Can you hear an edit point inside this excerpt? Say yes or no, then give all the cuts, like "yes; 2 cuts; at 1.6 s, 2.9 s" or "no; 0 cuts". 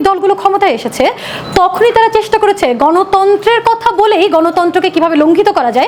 no; 0 cuts